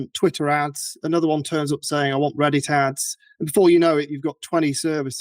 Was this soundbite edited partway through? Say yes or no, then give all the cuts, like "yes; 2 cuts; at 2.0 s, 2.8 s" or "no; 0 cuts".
no; 0 cuts